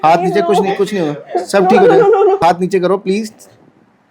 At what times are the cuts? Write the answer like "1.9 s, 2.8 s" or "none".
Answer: 2.4 s